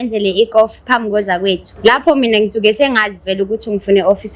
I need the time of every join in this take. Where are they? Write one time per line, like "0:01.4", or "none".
0:01.7

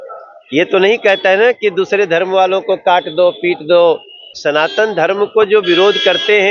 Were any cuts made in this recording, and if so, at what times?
0:04.3

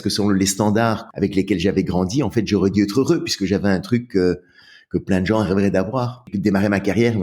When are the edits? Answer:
0:01.0
0:06.3

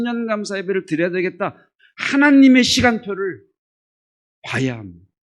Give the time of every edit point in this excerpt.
0:01.7

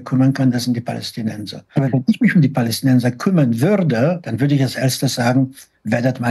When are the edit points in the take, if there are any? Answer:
0:01.7
0:04.3

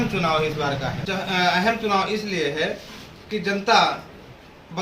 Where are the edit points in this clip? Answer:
0:01.0

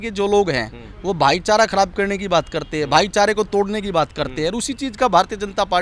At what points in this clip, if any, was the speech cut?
none

